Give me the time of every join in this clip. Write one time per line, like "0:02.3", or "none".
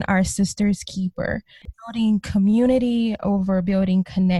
0:01.6